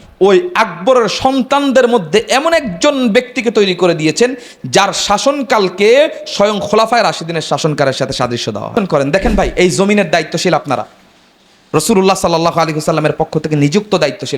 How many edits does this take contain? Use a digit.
1